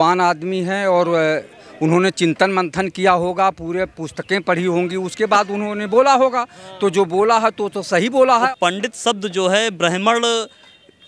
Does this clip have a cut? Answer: yes; 1 cut; at 8.5 s

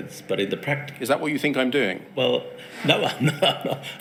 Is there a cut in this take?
no; 0 cuts

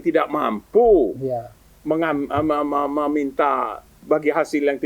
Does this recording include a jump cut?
yes; 1 cut; at 4.0 s

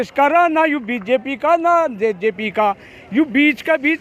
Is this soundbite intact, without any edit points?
yes; 0 cuts

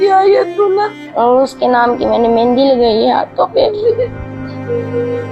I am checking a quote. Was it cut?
yes; 1 cut; at 1.0 s

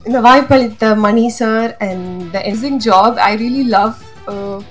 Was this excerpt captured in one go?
no; 1 cut; at 2.5 s

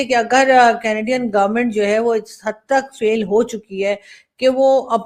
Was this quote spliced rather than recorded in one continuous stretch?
no; 0 cuts

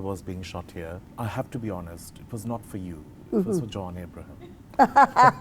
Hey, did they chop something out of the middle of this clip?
yes; 1 cut; at 1.0 s

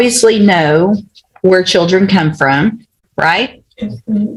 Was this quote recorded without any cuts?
yes; 0 cuts

